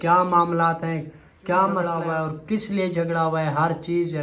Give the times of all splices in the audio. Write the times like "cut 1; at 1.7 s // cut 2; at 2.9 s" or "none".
cut 1; at 1.9 s